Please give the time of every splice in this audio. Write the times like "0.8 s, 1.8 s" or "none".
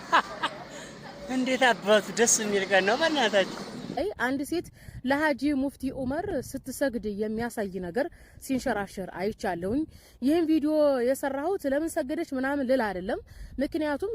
3.9 s

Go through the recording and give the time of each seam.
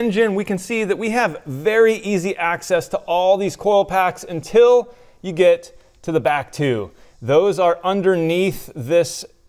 none

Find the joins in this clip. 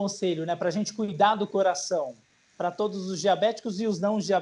none

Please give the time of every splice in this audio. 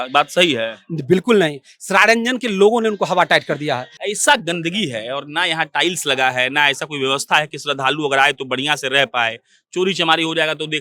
3.9 s

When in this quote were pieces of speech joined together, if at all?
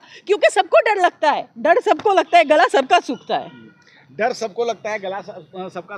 none

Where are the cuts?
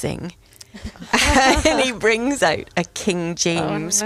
none

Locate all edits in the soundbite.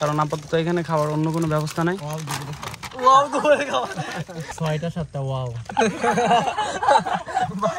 4.5 s

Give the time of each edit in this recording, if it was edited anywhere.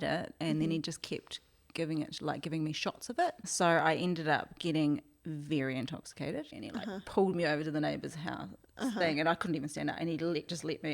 3.5 s, 6.6 s

